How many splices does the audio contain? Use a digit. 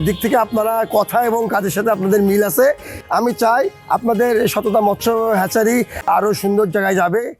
2